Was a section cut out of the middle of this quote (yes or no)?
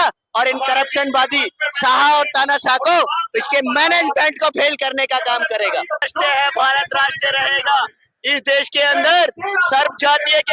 yes